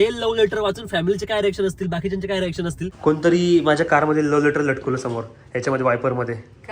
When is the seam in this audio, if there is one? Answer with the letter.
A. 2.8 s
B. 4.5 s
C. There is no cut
A